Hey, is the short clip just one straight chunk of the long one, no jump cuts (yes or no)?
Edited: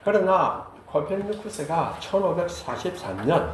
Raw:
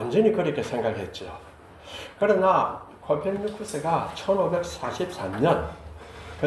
yes